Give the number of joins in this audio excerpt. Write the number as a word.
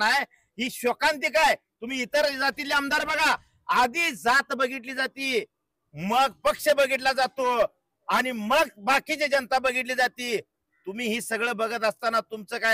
zero